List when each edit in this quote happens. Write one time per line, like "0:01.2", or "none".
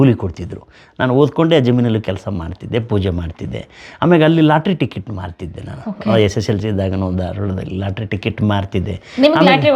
none